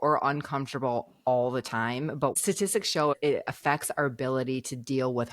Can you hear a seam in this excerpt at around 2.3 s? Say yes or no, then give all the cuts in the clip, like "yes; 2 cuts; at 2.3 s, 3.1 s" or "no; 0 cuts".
yes; 1 cut; at 2.3 s